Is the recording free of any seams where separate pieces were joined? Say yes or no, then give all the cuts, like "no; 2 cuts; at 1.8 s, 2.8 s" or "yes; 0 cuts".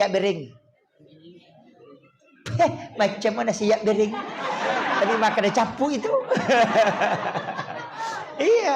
yes; 0 cuts